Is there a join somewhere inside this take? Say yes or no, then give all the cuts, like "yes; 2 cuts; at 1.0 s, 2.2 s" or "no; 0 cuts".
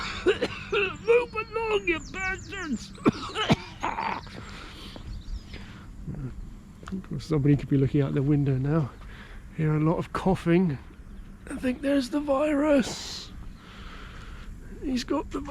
no; 0 cuts